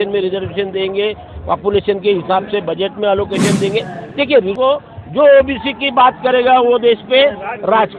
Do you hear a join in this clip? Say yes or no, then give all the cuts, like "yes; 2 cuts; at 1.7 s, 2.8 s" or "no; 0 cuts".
yes; 1 cut; at 4.5 s